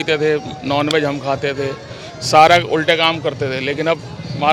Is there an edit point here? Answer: no; 0 cuts

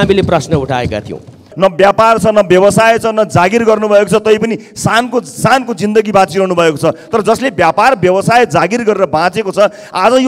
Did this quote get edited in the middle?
yes; 1 cut; at 1.5 s

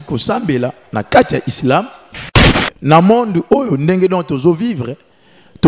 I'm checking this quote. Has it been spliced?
yes; 1 cut; at 2.5 s

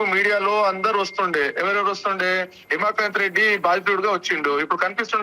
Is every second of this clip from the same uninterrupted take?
yes; 0 cuts

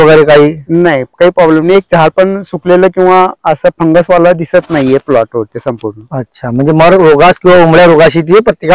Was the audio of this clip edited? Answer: no; 0 cuts

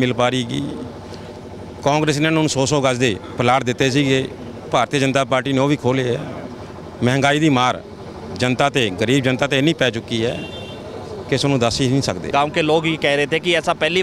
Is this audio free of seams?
no; 1 cut; at 12.3 s

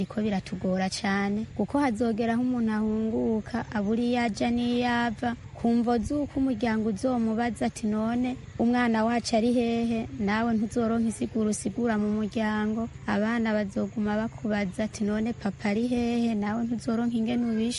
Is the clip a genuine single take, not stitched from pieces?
yes; 0 cuts

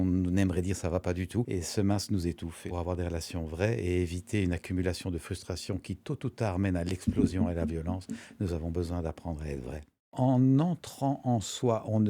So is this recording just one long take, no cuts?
no; 3 cuts; at 1.5 s, 2.6 s, 10.1 s

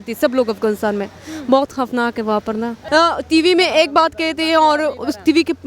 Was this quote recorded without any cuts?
no; 1 cut; at 2.8 s

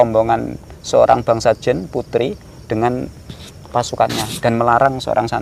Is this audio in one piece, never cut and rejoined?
yes; 0 cuts

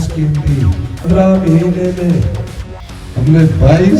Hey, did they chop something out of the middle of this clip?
yes; 1 cut; at 1.0 s

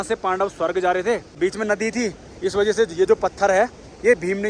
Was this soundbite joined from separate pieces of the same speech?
yes; 1 cut; at 1.3 s

